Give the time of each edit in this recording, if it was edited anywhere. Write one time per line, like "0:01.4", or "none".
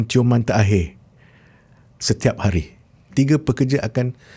0:03.1